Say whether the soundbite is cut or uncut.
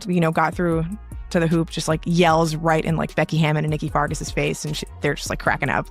cut